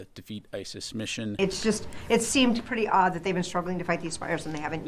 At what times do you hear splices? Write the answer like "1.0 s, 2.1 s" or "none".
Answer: 1.4 s